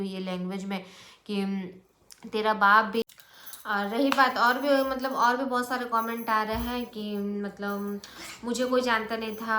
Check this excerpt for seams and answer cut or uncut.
cut